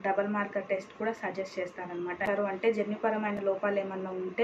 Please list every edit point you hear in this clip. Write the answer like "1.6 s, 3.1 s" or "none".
2.2 s